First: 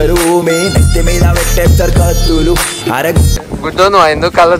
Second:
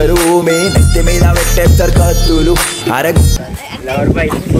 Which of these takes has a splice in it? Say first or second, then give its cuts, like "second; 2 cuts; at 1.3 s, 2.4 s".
first; 1 cut; at 3.5 s